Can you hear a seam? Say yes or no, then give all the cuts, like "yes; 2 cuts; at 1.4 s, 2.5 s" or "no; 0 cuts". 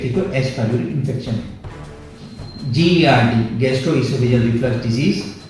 yes; 1 cut; at 2.1 s